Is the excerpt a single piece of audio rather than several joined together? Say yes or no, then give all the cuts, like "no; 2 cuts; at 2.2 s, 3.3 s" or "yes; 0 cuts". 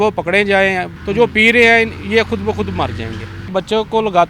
no; 2 cuts; at 0.9 s, 3.5 s